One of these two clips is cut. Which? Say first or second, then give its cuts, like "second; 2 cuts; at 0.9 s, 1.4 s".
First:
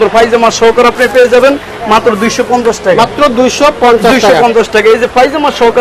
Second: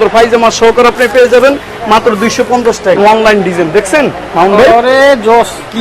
second; 1 cut; at 3.0 s